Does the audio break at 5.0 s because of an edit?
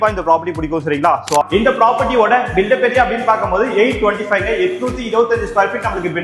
no; 1 cut; at 1.4 s

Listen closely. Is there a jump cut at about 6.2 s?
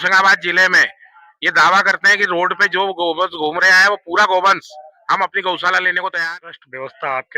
yes; 1 cut; at 6.2 s

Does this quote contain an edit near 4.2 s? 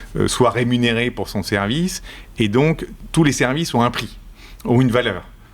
no; 1 cut; at 2.9 s

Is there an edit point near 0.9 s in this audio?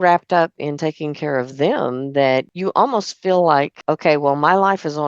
no; 2 cuts; at 2.5 s, 3.8 s

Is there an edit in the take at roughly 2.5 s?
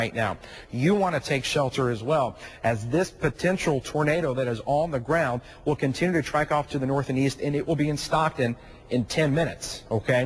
no; 0 cuts

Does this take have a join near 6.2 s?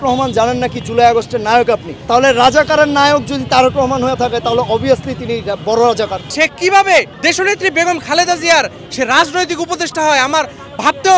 yes; 3 cuts; at 1.9 s, 6.2 s, 7.1 s

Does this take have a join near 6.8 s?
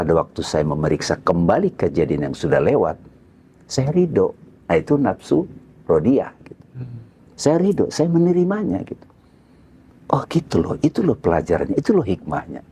no; 0 cuts

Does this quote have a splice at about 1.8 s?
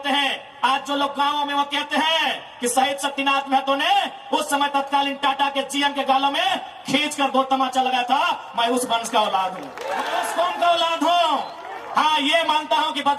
no; 1 cut; at 10.2 s

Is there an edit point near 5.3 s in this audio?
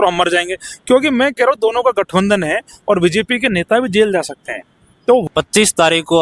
yes; 1 cut; at 5.3 s

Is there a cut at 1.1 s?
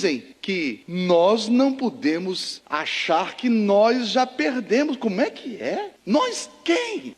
no; 0 cuts

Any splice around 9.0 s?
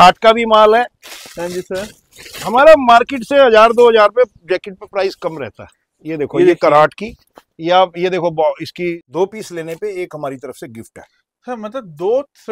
yes; 1 cut; at 9.0 s

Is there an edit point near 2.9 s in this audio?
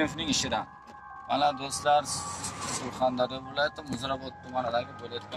no; 1 cut; at 1.2 s

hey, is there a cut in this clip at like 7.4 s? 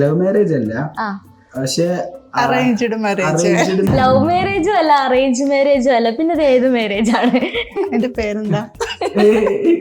no; 1 cut; at 3.9 s

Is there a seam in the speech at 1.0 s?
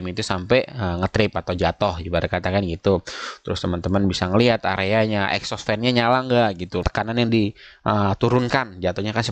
no; 1 cut; at 6.8 s

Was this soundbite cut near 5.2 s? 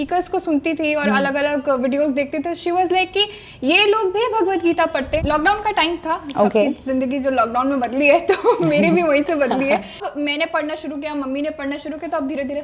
yes; 2 cuts; at 5.2 s, 10.1 s

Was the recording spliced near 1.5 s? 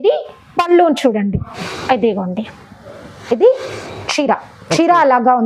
yes; 1 cut; at 1.5 s

